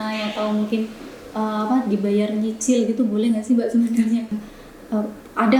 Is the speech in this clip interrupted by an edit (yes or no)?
yes